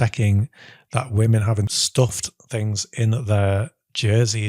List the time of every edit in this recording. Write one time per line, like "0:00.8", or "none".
0:01.8